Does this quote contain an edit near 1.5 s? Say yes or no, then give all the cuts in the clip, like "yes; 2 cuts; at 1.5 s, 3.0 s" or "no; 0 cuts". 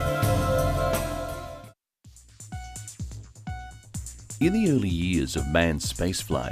yes; 1 cut; at 1.5 s